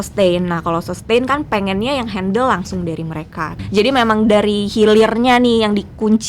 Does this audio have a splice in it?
yes; 1 cut; at 3.6 s

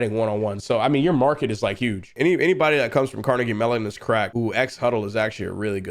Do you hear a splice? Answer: yes; 2 cuts; at 2.1 s, 4.3 s

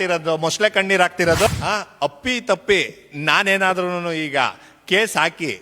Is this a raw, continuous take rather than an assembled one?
no; 1 cut; at 1.5 s

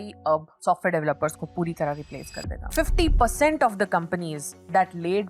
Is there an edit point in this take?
yes; 1 cut; at 2.7 s

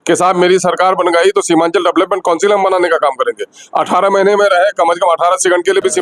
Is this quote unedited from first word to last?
yes; 0 cuts

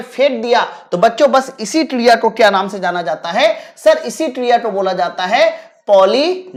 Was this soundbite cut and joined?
no; 0 cuts

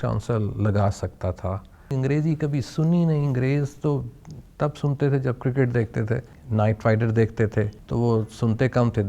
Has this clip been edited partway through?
yes; 3 cuts; at 1.9 s, 6.3 s, 7.8 s

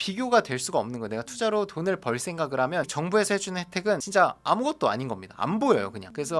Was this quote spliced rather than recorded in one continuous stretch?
no; 0 cuts

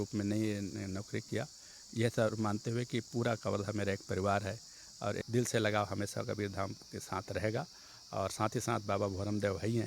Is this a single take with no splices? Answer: no; 1 cut; at 5.2 s

